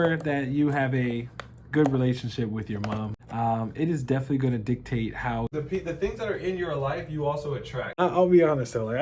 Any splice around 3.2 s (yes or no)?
yes